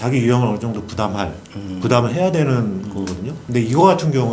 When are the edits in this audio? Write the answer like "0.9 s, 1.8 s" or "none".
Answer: 3.4 s